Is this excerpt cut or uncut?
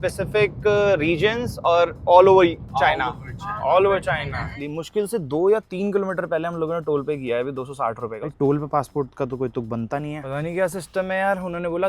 cut